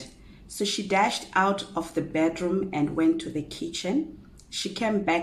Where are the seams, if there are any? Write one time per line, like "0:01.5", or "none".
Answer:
none